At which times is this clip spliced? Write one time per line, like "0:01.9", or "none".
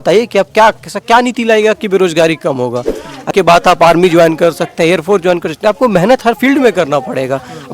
0:03.3